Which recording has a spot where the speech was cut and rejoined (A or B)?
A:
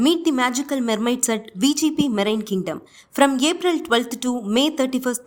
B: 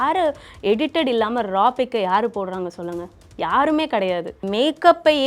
B